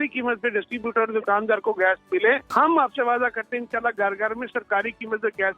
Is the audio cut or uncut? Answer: cut